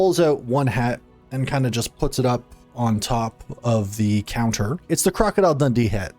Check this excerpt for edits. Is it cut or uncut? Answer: cut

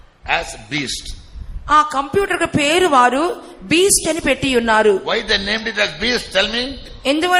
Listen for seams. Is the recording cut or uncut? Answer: uncut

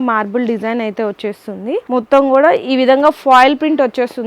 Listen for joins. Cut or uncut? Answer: cut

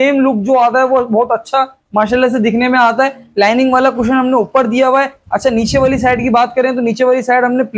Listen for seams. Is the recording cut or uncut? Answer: uncut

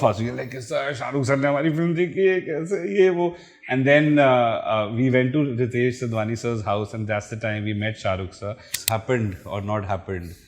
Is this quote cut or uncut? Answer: cut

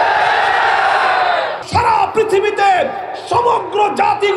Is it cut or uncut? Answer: cut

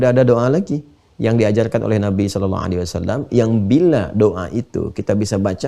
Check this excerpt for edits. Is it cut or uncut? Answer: uncut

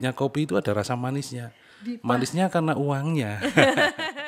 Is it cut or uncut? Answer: uncut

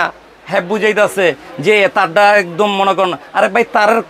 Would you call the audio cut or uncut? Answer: uncut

